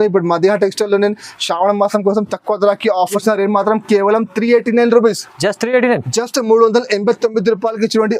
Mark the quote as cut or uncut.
cut